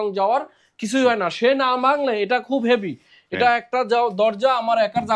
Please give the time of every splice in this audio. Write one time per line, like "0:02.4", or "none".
none